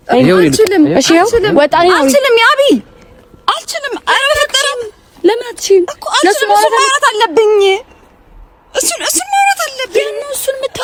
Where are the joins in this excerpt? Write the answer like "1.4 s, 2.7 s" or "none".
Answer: none